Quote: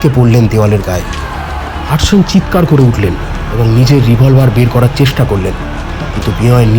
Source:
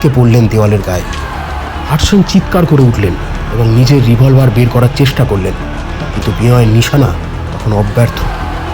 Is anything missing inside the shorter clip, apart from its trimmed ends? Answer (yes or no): no